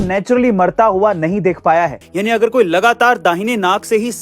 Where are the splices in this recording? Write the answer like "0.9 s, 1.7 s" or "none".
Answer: 2.0 s